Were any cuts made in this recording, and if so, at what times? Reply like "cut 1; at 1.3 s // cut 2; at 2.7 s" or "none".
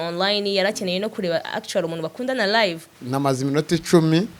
cut 1; at 3.0 s